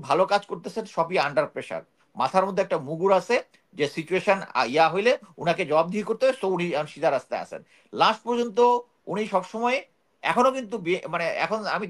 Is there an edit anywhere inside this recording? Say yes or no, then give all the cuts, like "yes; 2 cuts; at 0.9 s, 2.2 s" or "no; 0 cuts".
no; 0 cuts